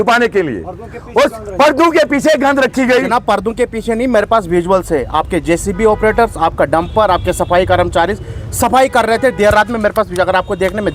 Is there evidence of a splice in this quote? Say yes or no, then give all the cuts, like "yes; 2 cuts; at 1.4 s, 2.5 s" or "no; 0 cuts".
no; 0 cuts